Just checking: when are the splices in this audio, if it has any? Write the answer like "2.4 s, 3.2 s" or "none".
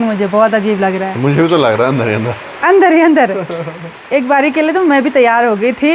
none